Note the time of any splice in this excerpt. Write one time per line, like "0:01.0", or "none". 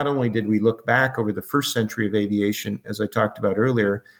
none